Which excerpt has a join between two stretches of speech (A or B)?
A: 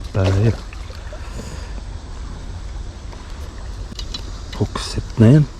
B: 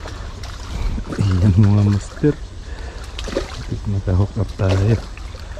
A